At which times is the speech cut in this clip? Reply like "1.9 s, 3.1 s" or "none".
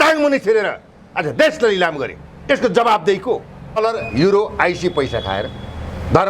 3.8 s